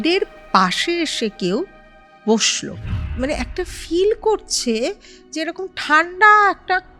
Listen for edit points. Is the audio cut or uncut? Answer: cut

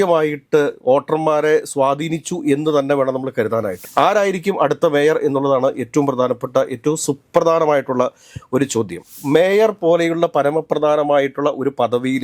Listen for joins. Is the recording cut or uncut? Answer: cut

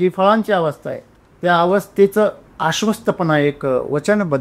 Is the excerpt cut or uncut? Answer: cut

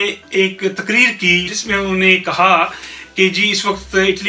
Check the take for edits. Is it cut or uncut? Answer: cut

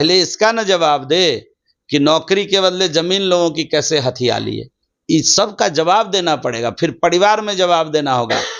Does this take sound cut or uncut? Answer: uncut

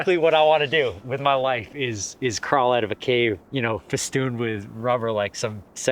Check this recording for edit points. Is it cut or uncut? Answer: cut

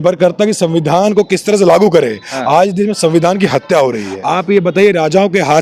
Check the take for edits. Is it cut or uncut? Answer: cut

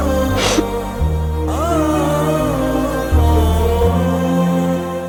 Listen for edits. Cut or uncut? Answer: uncut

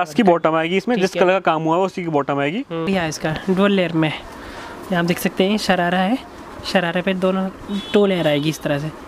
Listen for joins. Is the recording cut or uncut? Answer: cut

